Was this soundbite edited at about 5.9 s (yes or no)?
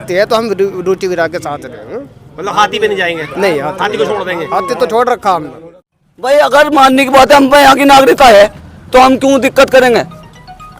yes